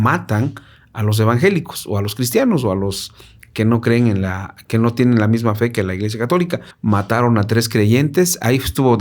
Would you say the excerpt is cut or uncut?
cut